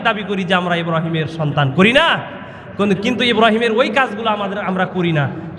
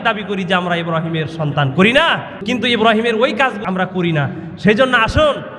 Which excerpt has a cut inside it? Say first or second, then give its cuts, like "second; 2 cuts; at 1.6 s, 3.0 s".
second; 2 cuts; at 2.4 s, 3.6 s